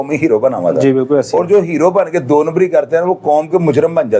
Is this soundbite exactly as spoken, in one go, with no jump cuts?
yes; 0 cuts

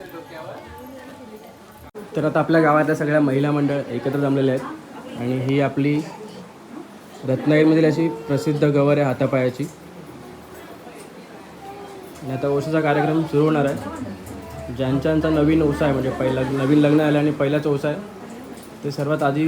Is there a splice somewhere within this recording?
yes; 1 cut; at 1.9 s

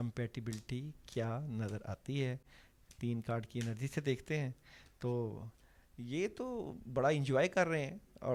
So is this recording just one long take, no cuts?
yes; 0 cuts

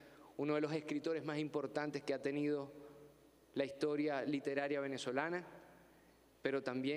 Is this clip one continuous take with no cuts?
no; 1 cut; at 2.7 s

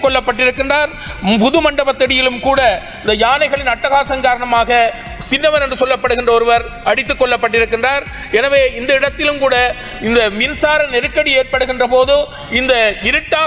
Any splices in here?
no; 0 cuts

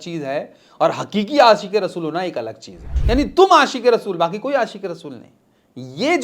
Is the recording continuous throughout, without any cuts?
no; 1 cut; at 3.0 s

